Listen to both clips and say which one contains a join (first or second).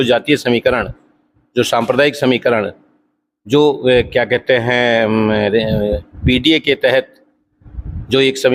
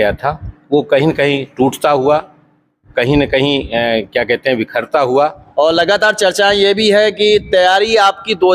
second